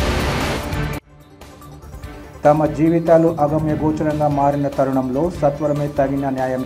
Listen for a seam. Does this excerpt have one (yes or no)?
yes